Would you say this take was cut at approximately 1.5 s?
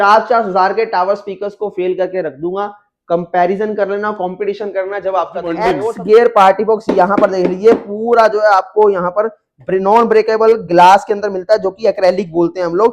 no; 1 cut; at 5.7 s

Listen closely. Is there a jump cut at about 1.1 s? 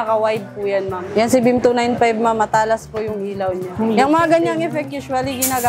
yes; 2 cuts; at 1.1 s, 3.7 s

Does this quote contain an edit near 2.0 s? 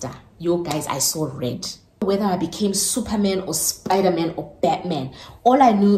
yes; 1 cut; at 2.0 s

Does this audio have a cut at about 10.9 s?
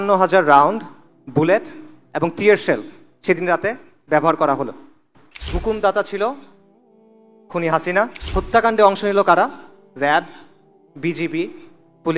no; 2 cuts; at 5.5 s, 8.2 s

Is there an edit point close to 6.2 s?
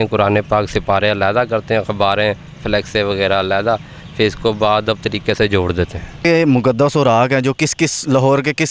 yes; 1 cut; at 6.2 s

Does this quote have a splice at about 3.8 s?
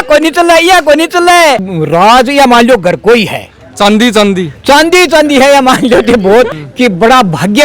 no; 2 cuts; at 1.7 s, 6.6 s

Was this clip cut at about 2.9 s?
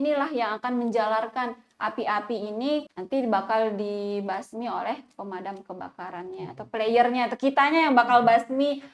yes; 1 cut; at 2.9 s

